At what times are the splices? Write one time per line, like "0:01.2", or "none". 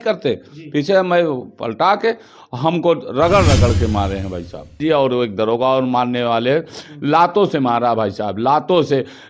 0:04.8